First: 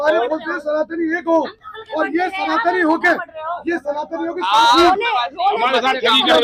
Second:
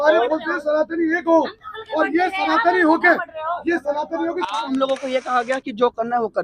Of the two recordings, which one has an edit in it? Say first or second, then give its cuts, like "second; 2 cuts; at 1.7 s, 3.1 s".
second; 1 cut; at 4.5 s